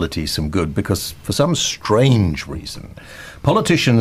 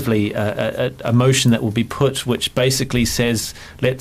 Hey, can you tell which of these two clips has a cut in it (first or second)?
second